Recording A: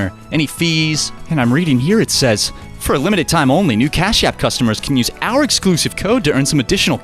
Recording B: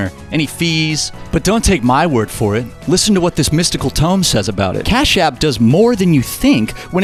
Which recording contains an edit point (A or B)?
A